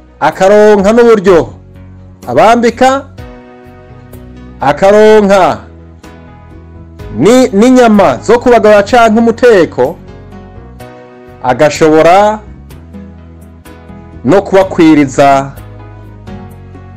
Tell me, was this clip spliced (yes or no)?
yes